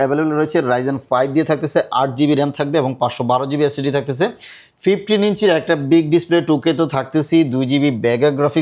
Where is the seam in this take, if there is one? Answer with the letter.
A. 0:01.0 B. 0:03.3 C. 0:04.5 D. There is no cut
D